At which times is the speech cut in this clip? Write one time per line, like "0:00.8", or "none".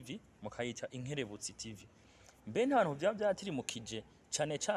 none